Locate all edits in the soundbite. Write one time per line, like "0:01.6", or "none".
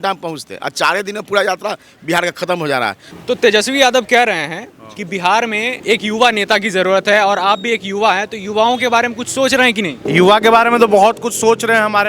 0:03.1
0:05.8
0:10.0

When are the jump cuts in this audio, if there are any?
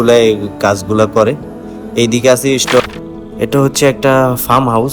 0:02.8

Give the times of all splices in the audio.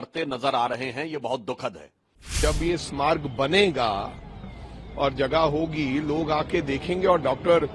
0:02.3

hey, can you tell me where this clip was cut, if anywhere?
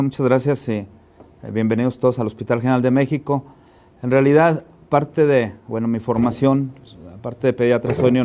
none

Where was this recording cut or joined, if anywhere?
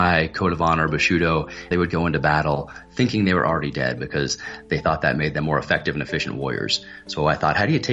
0:01.7

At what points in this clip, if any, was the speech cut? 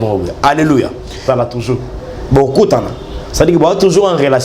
0:01.2

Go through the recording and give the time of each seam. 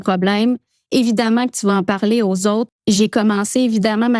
0:02.8

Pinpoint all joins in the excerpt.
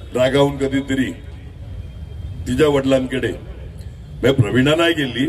none

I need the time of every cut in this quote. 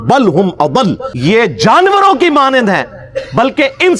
0:01.1

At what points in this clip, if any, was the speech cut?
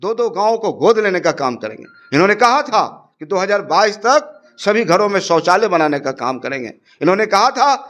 none

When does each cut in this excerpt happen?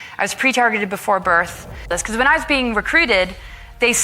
0:02.0

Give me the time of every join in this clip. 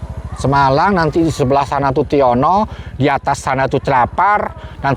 none

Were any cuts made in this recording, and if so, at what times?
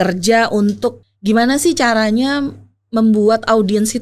0:01.0

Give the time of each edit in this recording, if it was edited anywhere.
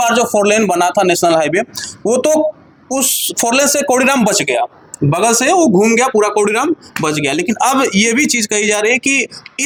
none

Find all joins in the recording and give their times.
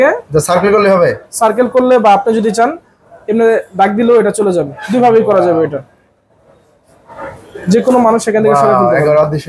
none

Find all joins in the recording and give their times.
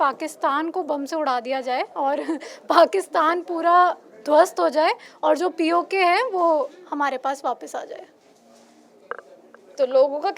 none

